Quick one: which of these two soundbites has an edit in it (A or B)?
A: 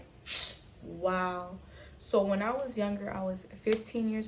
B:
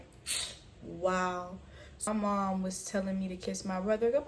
B